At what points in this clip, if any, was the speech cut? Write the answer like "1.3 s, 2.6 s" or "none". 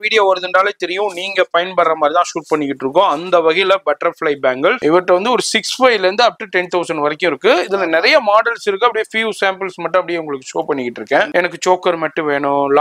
4.8 s, 11.3 s